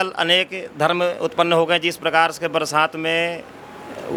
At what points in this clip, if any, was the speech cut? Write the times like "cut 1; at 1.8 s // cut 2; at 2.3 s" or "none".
none